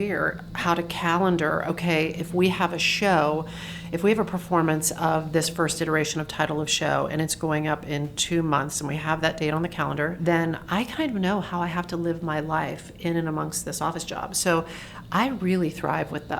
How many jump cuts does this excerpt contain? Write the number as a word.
one